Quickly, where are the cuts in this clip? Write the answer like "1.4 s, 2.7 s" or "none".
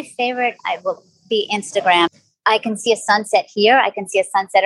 2.1 s